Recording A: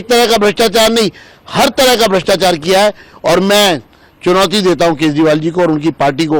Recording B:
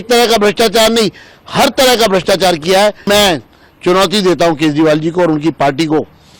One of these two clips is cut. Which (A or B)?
B